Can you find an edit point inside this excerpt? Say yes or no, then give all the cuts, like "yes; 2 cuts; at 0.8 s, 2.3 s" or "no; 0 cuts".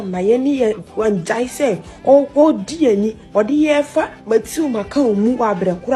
no; 0 cuts